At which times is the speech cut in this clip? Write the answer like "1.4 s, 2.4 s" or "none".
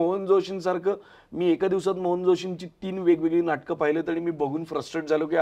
none